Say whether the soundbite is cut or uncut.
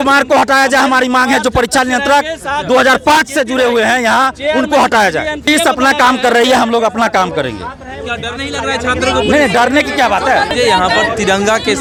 uncut